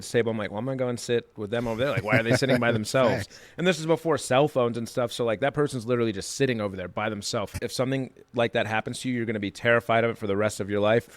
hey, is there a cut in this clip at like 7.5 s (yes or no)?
yes